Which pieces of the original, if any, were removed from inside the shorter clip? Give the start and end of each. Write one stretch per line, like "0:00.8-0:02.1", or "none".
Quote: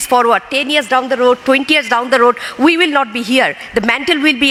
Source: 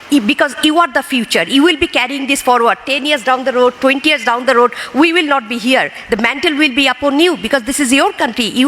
none